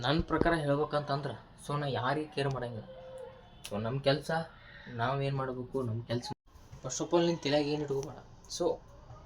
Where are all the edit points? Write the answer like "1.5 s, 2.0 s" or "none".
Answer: 6.3 s